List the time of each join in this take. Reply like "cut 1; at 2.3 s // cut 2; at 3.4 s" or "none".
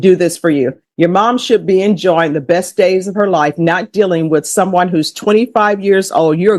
none